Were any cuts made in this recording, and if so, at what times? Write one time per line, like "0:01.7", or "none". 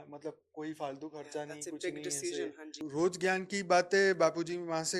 0:02.8